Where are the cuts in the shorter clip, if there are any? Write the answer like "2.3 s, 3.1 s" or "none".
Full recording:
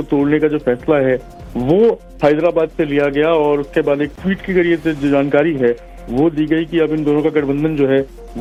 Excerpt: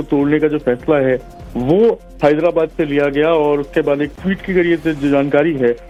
none